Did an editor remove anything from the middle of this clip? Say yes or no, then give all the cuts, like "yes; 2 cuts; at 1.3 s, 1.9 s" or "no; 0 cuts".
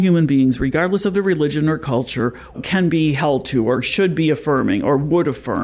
yes; 2 cuts; at 2.6 s, 3.9 s